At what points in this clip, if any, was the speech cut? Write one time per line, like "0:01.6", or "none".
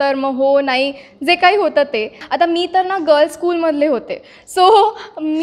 0:02.2